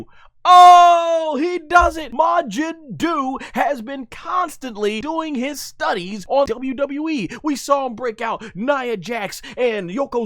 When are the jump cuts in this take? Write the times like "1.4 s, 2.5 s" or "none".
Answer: 2.0 s, 5.0 s, 6.4 s